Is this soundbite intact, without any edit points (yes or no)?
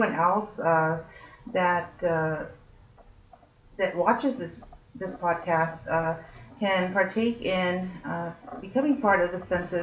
yes